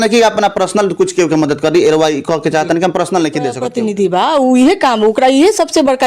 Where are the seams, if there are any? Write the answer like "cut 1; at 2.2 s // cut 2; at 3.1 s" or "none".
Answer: cut 1; at 3.7 s

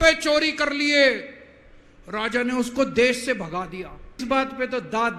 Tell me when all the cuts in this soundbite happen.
cut 1; at 4.2 s

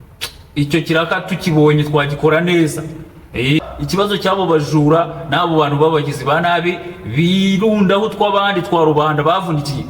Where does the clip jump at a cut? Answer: cut 1; at 3.6 s

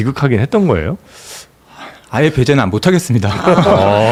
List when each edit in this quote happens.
none

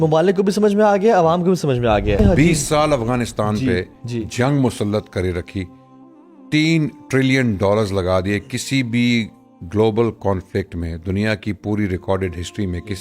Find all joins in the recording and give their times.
cut 1; at 2.2 s

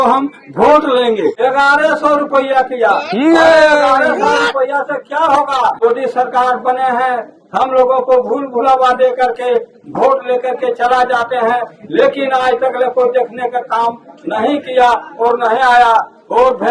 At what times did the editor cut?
cut 1; at 1.4 s // cut 2; at 5.8 s

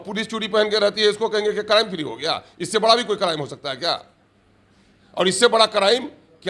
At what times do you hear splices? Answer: none

